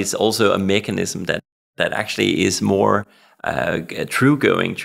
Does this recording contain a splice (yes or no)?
no